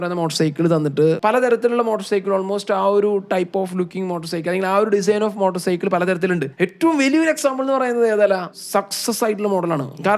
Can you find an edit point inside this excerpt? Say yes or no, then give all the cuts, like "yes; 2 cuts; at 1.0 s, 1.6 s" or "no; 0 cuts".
yes; 2 cuts; at 1.2 s, 8.6 s